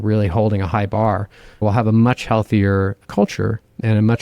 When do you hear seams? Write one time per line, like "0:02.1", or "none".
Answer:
0:01.6